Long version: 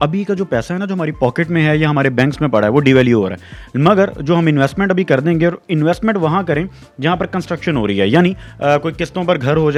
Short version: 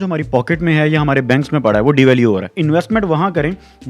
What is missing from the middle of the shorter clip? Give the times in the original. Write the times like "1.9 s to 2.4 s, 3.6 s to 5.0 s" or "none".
3.4 s to 5.6 s